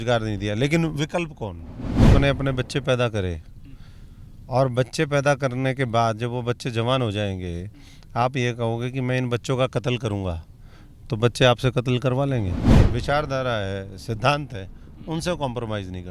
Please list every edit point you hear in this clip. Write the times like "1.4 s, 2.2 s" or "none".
2.1 s, 12.8 s